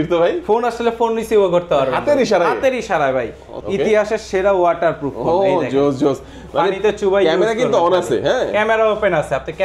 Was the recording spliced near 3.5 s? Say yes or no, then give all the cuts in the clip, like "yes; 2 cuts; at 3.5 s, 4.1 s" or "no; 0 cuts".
yes; 1 cut; at 3.5 s